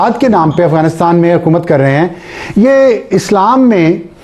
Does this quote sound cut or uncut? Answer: uncut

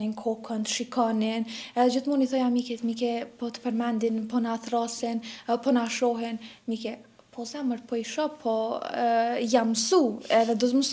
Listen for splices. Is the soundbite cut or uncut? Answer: uncut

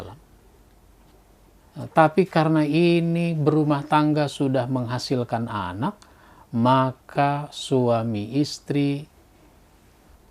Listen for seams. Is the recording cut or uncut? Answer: cut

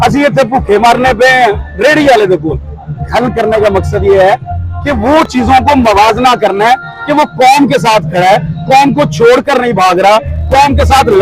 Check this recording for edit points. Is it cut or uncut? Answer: uncut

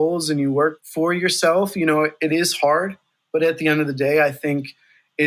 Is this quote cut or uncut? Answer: uncut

